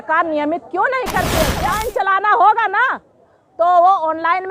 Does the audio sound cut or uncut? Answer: cut